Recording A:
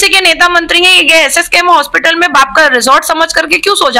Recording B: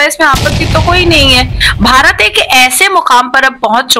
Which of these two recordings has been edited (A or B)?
B